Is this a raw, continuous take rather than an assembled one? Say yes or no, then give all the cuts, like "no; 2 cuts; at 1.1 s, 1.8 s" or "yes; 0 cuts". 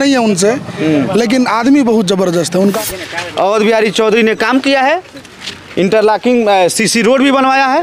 no; 1 cut; at 2.8 s